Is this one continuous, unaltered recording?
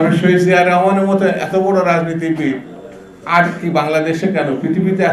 yes; 0 cuts

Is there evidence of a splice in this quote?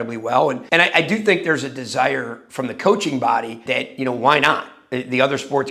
no; 0 cuts

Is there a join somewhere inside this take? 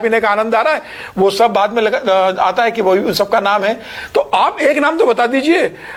no; 0 cuts

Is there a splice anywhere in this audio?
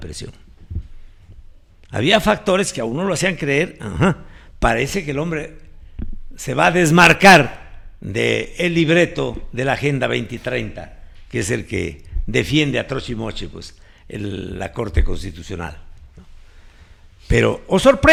no; 0 cuts

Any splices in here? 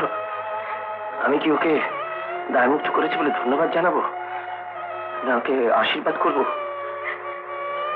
no; 0 cuts

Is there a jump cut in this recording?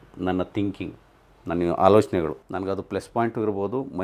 yes; 1 cut; at 2.4 s

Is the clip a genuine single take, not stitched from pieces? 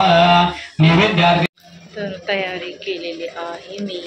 no; 1 cut; at 1.4 s

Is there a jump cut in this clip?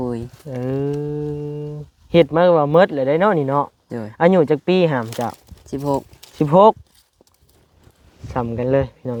no; 0 cuts

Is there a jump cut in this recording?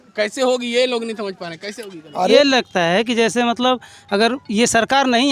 yes; 1 cut; at 2.4 s

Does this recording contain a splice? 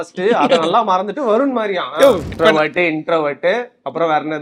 yes; 1 cut; at 2.3 s

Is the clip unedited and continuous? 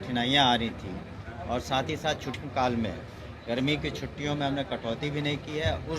no; 1 cut; at 2.4 s

